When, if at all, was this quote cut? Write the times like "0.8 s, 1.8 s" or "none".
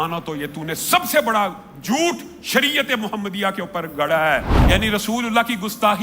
4.5 s

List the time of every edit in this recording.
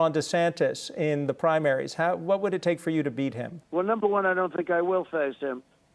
3.5 s

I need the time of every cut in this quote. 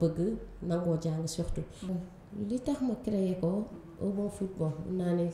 1.9 s

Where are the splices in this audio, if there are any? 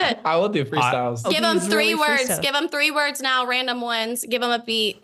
1.3 s

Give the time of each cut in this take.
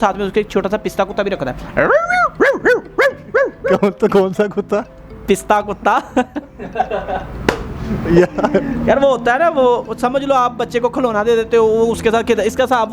6.1 s

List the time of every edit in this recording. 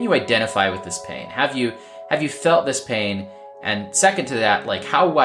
none

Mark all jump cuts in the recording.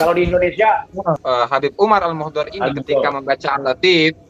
1.2 s

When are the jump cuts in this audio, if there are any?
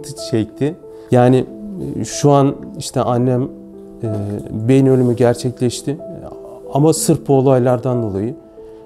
0.9 s

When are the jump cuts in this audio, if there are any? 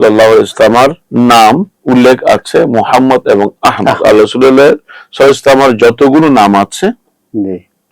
1.0 s, 1.7 s

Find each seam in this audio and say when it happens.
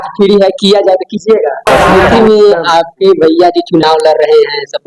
1.9 s

